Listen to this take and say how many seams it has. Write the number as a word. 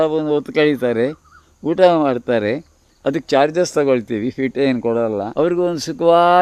one